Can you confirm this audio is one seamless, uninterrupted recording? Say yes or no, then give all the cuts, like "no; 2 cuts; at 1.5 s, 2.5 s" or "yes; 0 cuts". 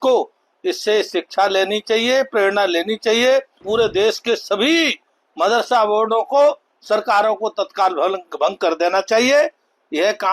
no; 1 cut; at 3.6 s